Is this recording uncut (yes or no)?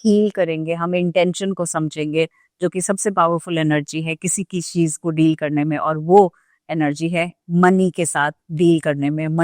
yes